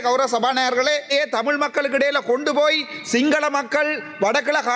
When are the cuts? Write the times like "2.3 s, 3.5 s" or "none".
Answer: 1.1 s